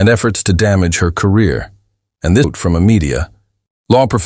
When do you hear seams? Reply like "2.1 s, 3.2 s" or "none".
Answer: 2.5 s